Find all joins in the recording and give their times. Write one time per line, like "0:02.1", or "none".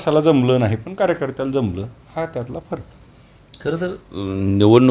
none